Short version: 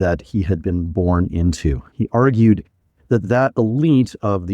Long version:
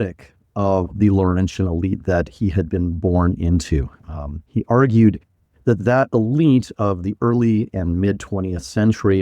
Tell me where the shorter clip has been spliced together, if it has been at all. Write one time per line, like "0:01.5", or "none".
0:01.9